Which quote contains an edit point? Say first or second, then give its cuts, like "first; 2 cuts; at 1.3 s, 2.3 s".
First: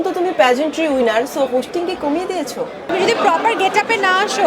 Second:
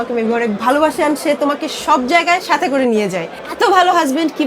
first; 1 cut; at 2.9 s